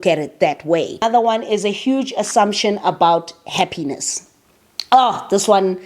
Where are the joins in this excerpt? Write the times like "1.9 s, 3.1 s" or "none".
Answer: 0.9 s